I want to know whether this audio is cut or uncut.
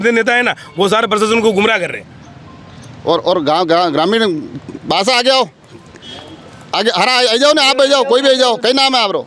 uncut